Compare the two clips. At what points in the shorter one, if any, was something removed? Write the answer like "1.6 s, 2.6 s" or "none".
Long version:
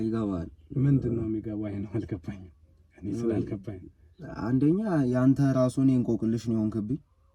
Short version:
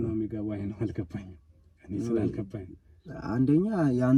none